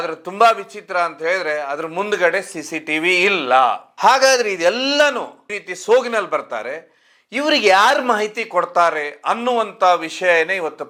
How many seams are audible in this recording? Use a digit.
0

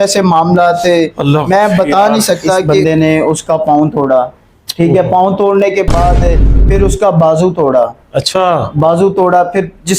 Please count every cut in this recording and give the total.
1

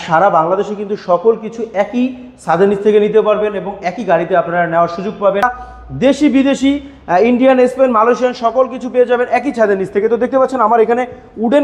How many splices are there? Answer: 1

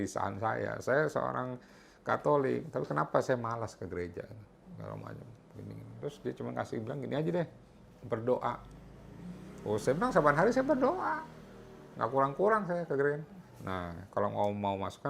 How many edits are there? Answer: 0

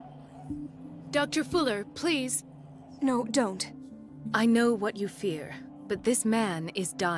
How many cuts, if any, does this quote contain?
1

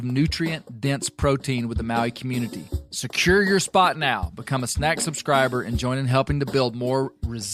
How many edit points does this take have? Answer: 0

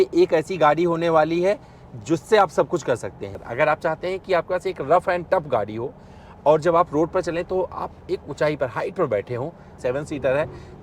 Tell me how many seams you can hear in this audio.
2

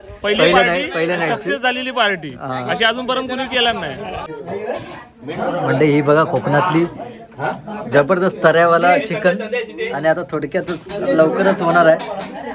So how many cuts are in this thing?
1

